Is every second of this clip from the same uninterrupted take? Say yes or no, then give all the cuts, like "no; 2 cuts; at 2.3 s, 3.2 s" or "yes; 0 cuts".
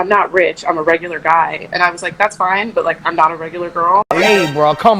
yes; 0 cuts